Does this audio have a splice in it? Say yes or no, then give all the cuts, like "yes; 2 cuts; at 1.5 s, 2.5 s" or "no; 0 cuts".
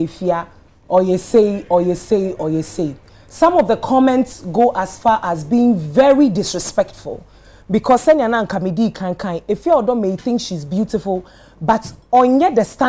no; 0 cuts